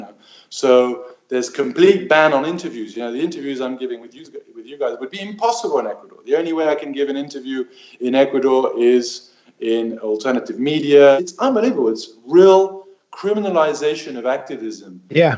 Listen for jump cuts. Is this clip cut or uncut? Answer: cut